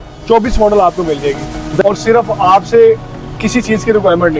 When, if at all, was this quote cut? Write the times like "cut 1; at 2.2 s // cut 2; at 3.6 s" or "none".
cut 1; at 1.8 s